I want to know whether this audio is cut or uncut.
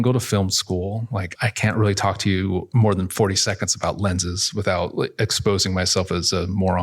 cut